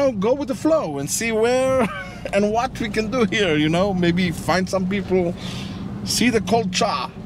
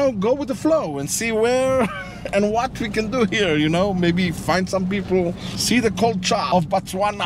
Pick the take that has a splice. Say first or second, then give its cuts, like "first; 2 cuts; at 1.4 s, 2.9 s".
second; 2 cuts; at 5.5 s, 6.5 s